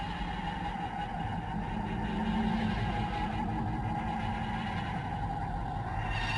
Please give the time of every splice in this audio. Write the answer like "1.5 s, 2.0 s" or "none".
none